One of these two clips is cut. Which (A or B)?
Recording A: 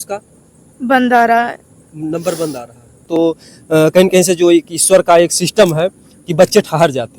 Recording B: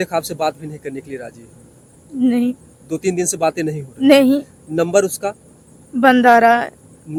A